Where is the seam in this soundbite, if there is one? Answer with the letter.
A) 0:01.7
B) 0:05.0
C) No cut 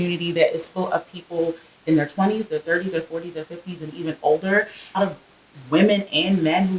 B